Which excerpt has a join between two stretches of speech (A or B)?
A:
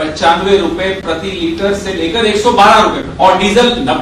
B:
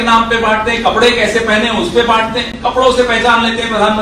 A